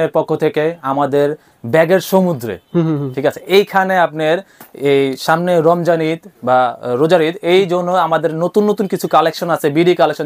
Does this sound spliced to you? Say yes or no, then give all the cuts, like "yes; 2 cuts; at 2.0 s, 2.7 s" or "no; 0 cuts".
no; 0 cuts